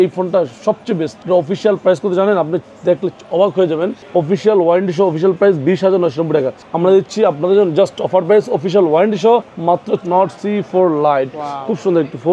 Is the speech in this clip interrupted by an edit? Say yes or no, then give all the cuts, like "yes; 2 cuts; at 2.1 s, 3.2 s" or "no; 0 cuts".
yes; 4 cuts; at 1.1 s, 4.0 s, 6.6 s, 10.0 s